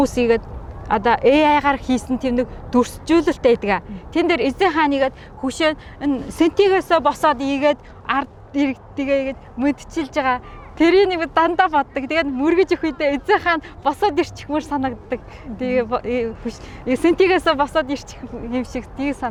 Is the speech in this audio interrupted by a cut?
no; 0 cuts

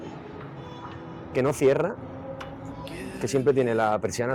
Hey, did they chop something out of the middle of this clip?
no; 0 cuts

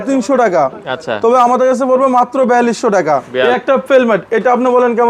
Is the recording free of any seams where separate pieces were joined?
no; 1 cut; at 3.3 s

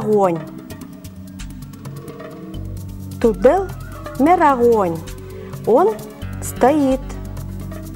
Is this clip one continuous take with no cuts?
no; 1 cut; at 7.0 s

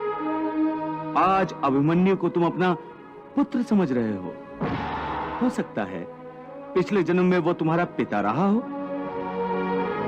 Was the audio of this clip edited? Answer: yes; 1 cut; at 5.3 s

